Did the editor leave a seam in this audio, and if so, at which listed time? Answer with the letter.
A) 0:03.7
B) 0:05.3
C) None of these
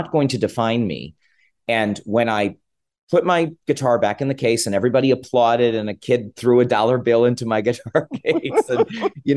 C